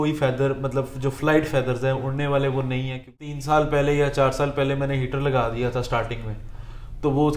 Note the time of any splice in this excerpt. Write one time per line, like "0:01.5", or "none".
0:03.3